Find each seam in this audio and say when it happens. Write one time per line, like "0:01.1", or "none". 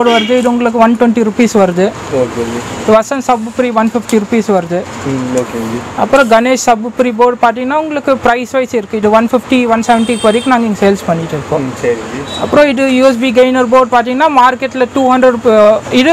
none